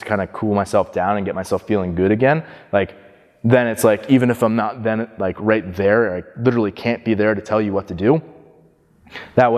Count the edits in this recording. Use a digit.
0